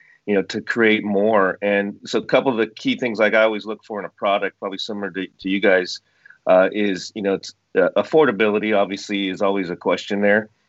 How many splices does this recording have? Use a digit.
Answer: 0